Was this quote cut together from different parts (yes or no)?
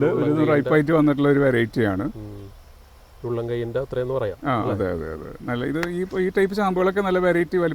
no